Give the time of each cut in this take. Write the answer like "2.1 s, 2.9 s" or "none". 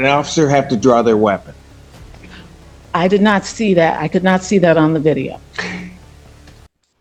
none